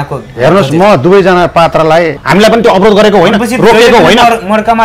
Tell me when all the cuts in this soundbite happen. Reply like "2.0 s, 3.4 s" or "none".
2.2 s